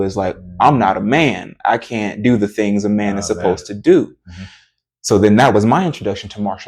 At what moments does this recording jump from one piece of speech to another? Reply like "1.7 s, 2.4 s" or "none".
none